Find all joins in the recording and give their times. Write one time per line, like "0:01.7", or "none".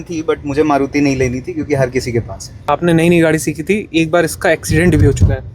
0:02.7